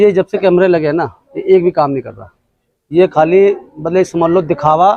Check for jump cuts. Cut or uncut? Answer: uncut